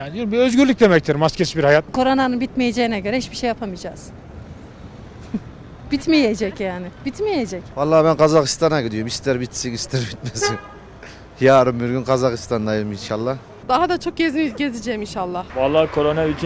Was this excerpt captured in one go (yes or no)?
no